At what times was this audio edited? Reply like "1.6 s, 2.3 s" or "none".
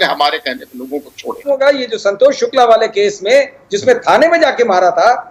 none